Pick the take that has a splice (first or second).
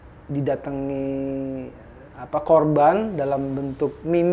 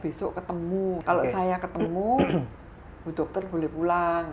second